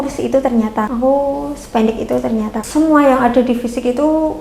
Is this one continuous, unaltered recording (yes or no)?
no